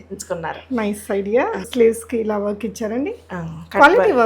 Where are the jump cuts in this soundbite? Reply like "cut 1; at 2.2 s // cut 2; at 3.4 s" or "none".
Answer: cut 1; at 1.7 s